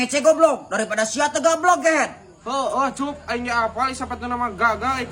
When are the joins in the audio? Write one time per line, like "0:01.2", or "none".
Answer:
none